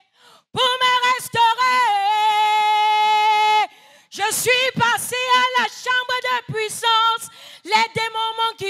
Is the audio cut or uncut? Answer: uncut